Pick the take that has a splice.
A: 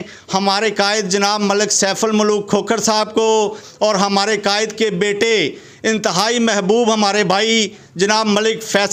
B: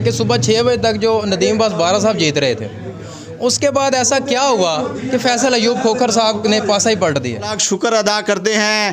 B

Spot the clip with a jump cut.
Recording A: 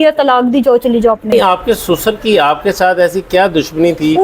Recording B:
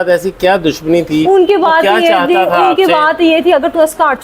A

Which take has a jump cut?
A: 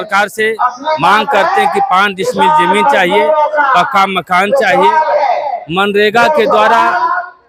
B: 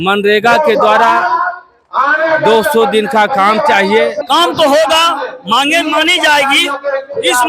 B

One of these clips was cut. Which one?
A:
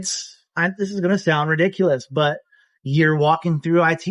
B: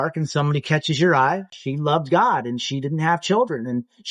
B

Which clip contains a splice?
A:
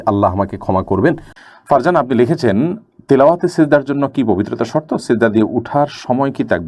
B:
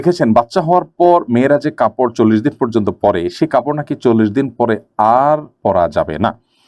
A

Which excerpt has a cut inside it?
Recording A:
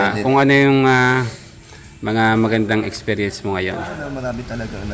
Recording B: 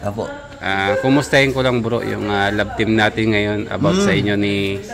A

